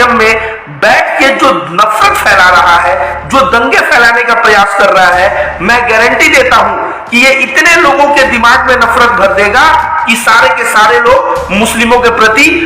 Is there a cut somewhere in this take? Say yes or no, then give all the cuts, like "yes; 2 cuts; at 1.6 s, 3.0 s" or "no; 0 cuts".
no; 0 cuts